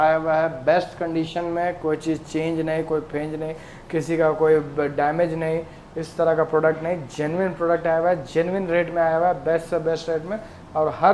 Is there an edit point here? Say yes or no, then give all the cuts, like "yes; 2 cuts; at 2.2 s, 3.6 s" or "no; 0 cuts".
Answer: no; 0 cuts